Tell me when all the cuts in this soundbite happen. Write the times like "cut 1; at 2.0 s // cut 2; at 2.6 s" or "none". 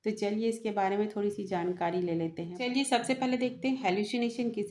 cut 1; at 2.6 s